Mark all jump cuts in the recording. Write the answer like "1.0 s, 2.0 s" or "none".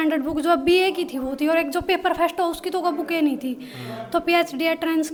none